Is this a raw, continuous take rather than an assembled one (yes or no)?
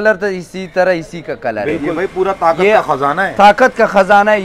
no